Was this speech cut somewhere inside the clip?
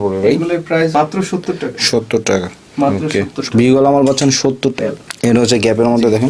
yes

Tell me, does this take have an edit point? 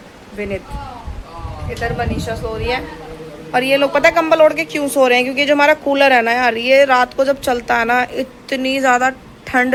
no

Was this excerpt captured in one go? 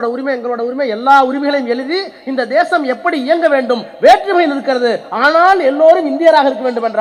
yes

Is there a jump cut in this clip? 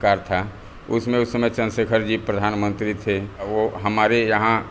yes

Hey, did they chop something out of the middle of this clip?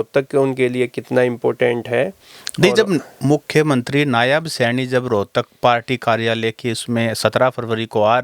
no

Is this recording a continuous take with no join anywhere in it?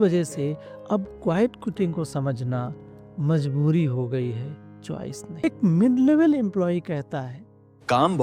no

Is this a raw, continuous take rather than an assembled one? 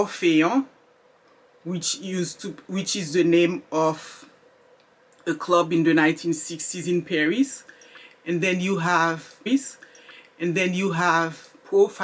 yes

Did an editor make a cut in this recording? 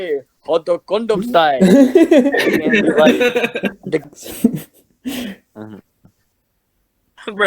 yes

